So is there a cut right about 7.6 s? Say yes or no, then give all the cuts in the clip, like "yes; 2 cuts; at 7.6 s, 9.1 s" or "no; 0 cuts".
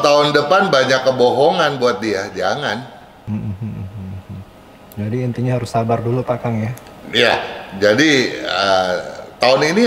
no; 0 cuts